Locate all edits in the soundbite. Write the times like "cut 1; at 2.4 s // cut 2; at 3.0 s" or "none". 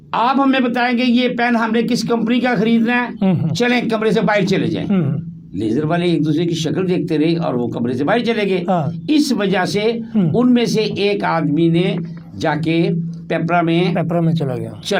none